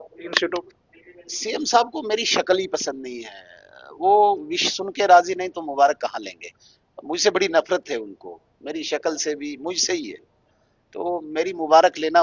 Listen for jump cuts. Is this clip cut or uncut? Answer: uncut